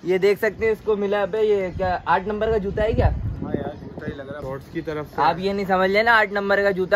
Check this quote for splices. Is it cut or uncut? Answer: cut